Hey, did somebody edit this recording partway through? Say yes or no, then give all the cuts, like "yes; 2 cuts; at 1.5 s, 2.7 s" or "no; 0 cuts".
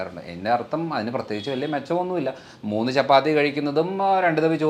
no; 0 cuts